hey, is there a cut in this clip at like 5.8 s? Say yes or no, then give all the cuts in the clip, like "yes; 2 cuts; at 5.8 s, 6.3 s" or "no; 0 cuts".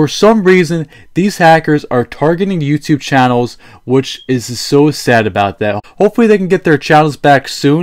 yes; 1 cut; at 5.8 s